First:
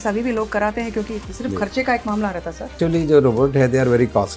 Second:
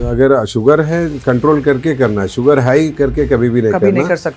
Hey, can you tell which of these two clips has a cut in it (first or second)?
first